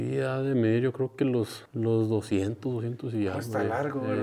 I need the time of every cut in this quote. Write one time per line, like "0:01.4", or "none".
0:01.6